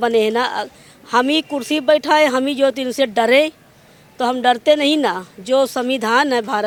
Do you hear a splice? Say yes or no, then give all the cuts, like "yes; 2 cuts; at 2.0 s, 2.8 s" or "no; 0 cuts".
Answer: no; 0 cuts